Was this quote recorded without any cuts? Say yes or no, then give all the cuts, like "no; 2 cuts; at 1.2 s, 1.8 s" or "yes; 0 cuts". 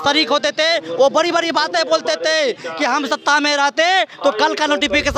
yes; 0 cuts